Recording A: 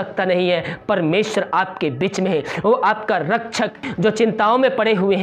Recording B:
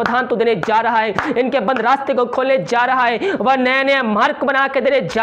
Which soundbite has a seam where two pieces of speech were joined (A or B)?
A